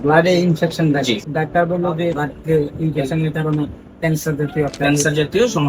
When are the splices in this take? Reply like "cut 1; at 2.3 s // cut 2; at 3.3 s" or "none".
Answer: cut 1; at 1.2 s // cut 2; at 2.2 s